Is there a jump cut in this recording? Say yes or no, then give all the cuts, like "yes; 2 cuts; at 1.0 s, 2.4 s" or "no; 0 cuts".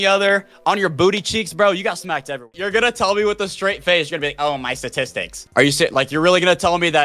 yes; 2 cuts; at 2.4 s, 5.4 s